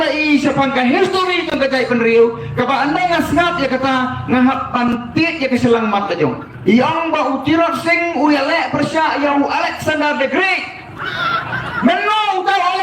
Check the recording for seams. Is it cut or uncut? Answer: cut